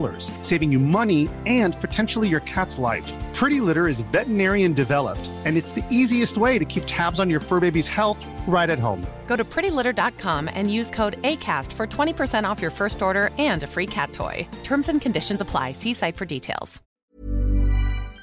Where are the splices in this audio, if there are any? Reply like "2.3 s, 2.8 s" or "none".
17.1 s